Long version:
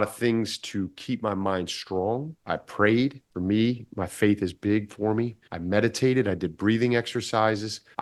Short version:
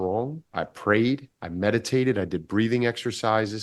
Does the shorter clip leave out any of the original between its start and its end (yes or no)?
yes